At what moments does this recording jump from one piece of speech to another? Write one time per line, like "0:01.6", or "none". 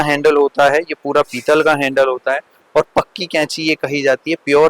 none